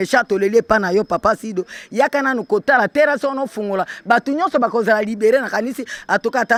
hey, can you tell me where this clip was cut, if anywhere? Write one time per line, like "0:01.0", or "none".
none